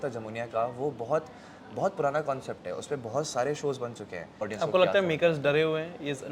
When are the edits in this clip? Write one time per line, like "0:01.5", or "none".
0:04.4